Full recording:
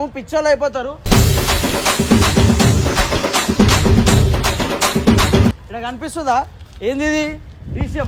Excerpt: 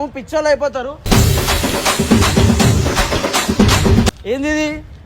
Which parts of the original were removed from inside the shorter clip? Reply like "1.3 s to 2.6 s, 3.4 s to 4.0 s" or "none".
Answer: 4.1 s to 6.6 s

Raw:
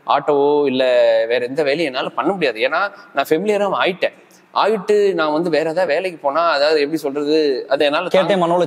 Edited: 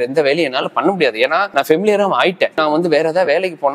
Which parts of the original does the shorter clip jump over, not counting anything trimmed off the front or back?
2.9 s to 3.1 s, 4.2 s to 5.2 s

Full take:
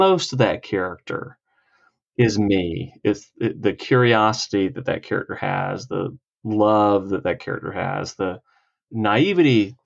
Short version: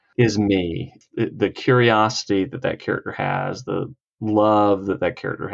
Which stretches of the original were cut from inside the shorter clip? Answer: 3.0 s to 3.2 s

